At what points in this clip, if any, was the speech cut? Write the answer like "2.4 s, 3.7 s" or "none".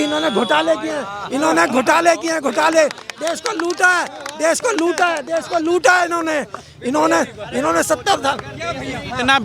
none